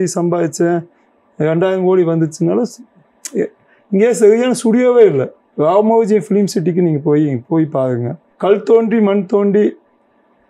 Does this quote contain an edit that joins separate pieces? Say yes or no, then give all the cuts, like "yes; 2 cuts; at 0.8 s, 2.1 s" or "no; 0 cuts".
no; 0 cuts